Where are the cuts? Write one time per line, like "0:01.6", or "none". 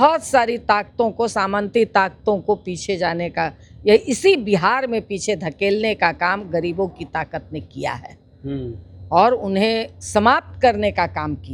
none